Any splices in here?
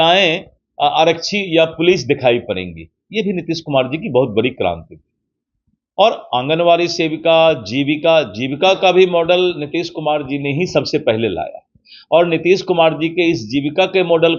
no; 0 cuts

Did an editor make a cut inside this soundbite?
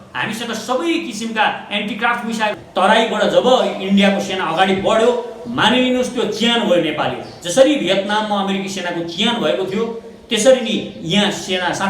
yes; 1 cut; at 2.6 s

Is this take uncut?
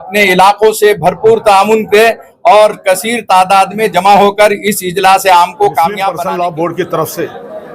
no; 1 cut; at 6.1 s

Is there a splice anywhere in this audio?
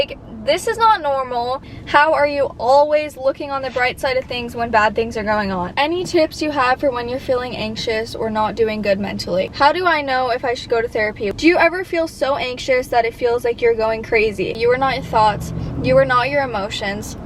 yes; 5 cuts; at 1.7 s, 5.7 s, 9.5 s, 11.3 s, 14.6 s

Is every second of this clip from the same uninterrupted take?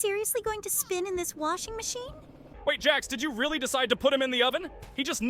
no; 1 cut; at 2.4 s

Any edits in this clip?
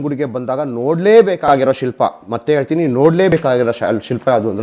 no; 0 cuts

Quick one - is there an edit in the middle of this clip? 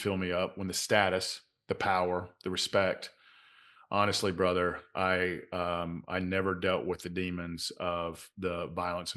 no; 0 cuts

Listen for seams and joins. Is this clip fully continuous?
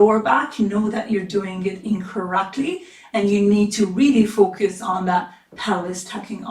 yes; 0 cuts

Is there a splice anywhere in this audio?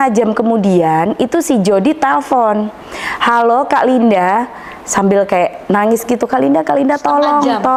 no; 0 cuts

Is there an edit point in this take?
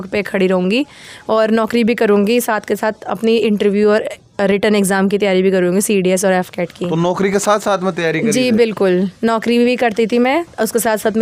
no; 0 cuts

